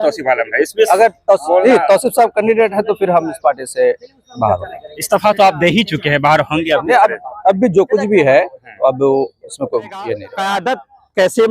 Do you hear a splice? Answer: yes; 1 cut; at 10.3 s

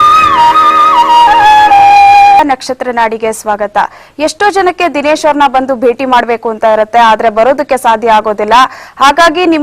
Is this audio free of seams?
no; 1 cut; at 2.4 s

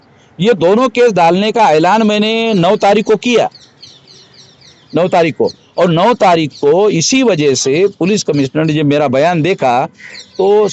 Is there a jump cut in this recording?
no; 0 cuts

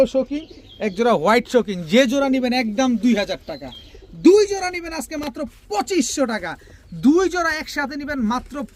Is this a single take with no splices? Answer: yes; 0 cuts

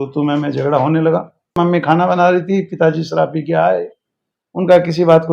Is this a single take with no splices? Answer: no; 1 cut; at 1.6 s

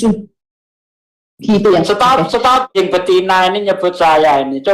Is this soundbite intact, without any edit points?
no; 1 cut; at 2.7 s

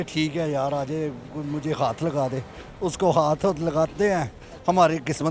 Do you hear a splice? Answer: no; 0 cuts

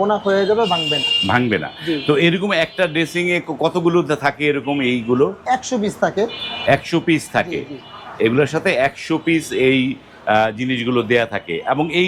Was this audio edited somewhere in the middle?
no; 0 cuts

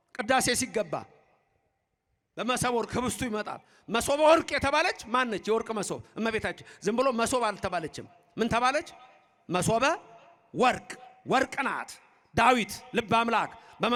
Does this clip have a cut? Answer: no; 0 cuts

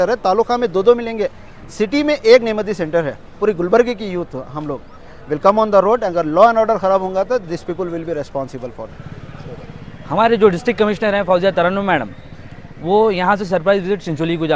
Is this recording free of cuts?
no; 2 cuts; at 3.4 s, 8.8 s

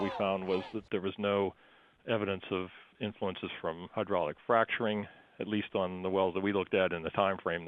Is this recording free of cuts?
yes; 0 cuts

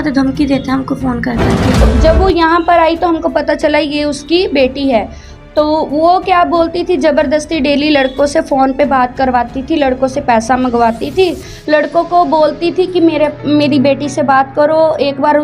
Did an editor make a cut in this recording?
yes; 1 cut; at 1.9 s

